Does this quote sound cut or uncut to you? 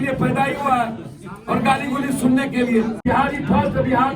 cut